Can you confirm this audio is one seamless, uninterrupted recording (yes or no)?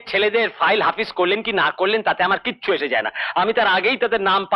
yes